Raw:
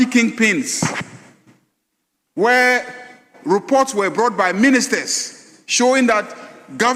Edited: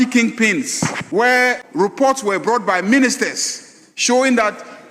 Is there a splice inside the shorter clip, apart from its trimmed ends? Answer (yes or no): yes